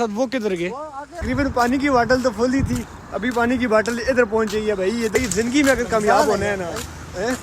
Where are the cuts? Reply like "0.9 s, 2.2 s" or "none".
1.2 s, 5.1 s